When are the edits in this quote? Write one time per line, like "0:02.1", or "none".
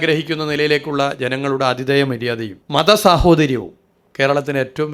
0:02.5